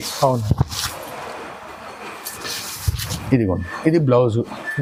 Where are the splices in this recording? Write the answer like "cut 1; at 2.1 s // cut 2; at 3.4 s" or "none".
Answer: none